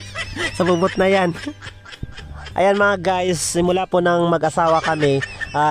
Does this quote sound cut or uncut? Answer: cut